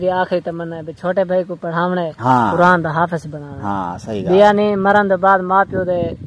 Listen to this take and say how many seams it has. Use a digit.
0